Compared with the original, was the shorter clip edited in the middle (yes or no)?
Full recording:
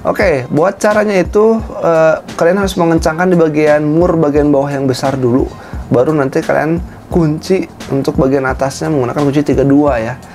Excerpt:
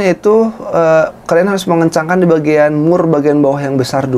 no